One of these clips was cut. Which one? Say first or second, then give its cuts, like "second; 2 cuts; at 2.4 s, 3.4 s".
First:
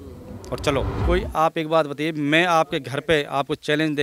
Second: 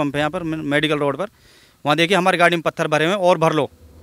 first; 1 cut; at 0.9 s